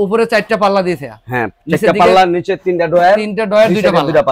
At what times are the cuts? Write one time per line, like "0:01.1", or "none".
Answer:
none